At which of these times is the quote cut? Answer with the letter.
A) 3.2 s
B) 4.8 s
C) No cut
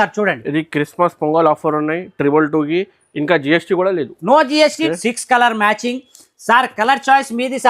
B